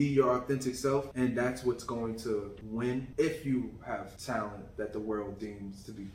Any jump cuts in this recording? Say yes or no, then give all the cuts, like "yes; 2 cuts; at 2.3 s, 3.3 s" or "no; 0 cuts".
yes; 3 cuts; at 1.1 s, 2.9 s, 4.1 s